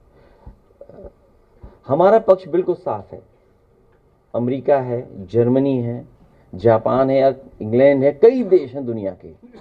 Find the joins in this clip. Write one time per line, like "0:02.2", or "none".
none